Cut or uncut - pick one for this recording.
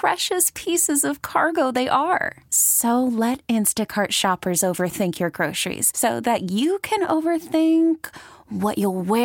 uncut